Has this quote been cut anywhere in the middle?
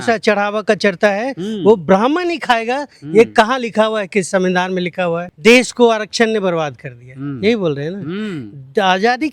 yes; 1 cut; at 5.3 s

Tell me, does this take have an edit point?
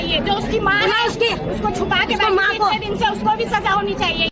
no; 0 cuts

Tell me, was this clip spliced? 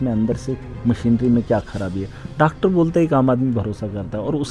no; 0 cuts

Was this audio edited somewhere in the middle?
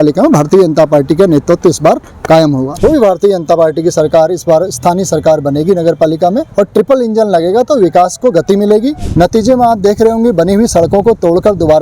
yes; 3 cuts; at 2.7 s, 6.5 s, 9.0 s

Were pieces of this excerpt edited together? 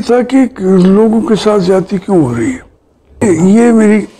yes; 1 cut; at 3.2 s

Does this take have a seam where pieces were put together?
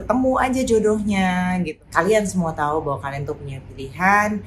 yes; 1 cut; at 1.7 s

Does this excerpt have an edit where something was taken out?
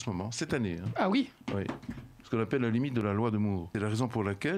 yes; 1 cut; at 3.7 s

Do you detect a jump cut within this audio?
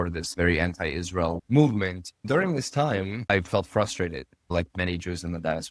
yes; 2 cuts; at 2.1 s, 3.2 s

